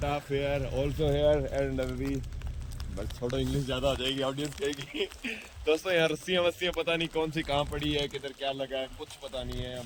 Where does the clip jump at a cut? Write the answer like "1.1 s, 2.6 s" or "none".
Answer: none